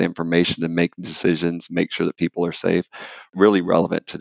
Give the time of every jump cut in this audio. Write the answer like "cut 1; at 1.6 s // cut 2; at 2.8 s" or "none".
none

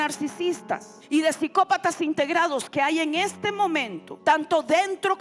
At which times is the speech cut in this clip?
cut 1; at 0.9 s // cut 2; at 4.0 s

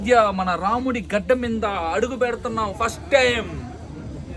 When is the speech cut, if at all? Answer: none

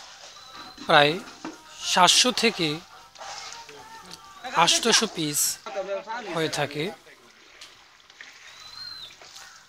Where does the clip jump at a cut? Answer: none

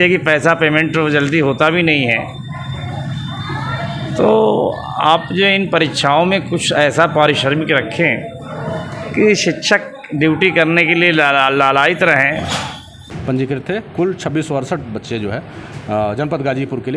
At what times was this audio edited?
cut 1; at 13.1 s

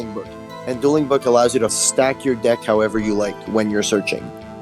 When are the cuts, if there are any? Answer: cut 1; at 1.7 s

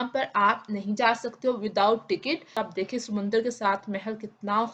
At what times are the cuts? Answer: cut 1; at 2.6 s

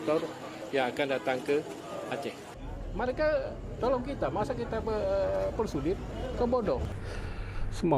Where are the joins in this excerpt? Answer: cut 1; at 2.5 s // cut 2; at 6.9 s

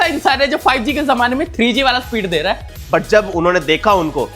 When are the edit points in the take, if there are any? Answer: cut 1; at 2.6 s

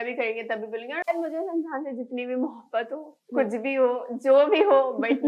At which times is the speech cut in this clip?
cut 1; at 1.1 s

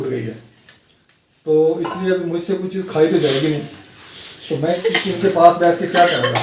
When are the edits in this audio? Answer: cut 1; at 4.8 s

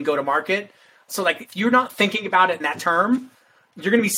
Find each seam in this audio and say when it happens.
cut 1; at 1.0 s // cut 2; at 2.7 s

